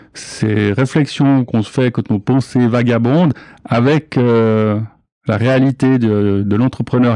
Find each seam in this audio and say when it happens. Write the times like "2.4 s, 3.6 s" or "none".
none